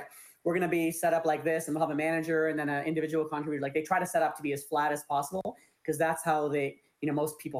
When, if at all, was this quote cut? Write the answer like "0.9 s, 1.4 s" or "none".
none